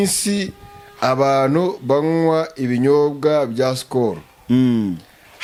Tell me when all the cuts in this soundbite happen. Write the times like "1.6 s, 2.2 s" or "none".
none

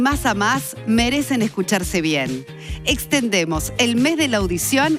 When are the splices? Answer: none

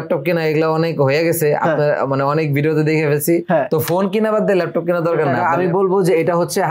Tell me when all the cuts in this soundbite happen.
5.3 s

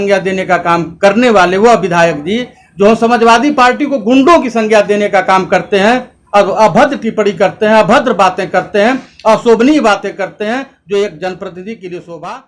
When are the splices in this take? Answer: none

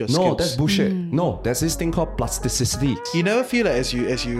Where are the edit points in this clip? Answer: 3.0 s

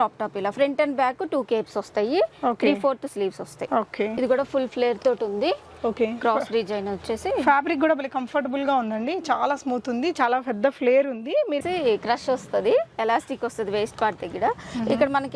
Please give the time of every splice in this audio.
4.1 s, 11.6 s

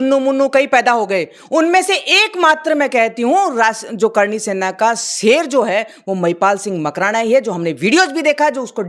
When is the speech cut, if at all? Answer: none

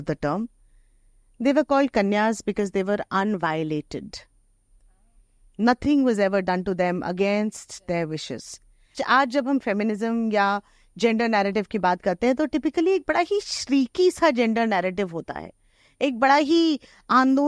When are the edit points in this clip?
9.0 s

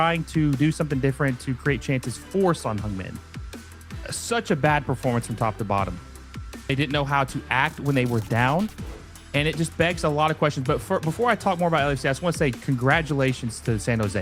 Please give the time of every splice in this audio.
none

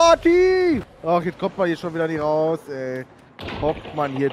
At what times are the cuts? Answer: 0.9 s

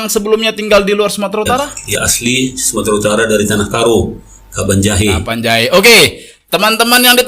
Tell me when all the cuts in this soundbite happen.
1.8 s

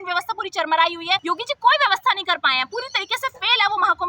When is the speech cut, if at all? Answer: 1.2 s

